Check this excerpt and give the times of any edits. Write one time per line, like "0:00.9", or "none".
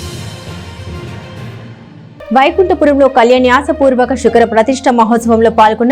none